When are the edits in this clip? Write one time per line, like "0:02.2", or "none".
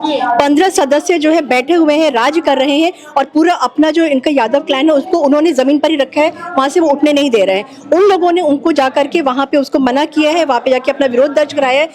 none